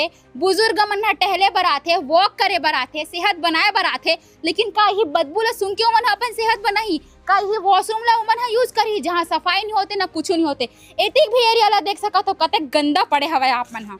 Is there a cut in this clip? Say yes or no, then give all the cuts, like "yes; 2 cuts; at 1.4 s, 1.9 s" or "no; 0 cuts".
no; 0 cuts